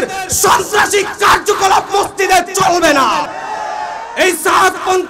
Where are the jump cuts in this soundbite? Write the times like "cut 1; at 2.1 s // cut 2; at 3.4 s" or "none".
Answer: cut 1; at 3.4 s